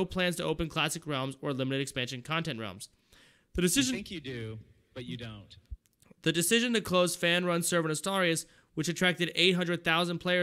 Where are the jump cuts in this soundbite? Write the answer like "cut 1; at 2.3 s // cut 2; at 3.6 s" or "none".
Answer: cut 1; at 2.1 s